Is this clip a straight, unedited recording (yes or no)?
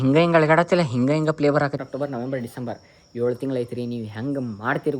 no